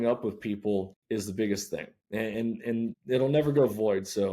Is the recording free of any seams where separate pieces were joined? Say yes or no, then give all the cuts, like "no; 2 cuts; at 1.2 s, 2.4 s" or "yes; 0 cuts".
no; 3 cuts; at 1.0 s, 2.0 s, 3.0 s